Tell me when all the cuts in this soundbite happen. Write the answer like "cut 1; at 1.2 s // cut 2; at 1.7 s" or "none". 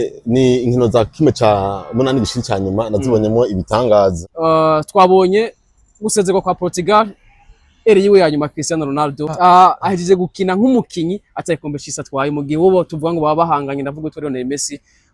cut 1; at 4.2 s // cut 2; at 9.3 s